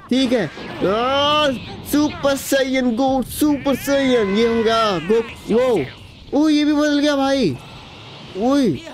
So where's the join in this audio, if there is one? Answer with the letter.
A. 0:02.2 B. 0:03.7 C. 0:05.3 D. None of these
C